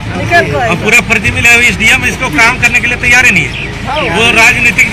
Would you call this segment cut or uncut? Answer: uncut